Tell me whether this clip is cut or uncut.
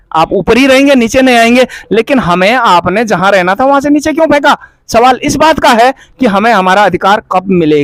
uncut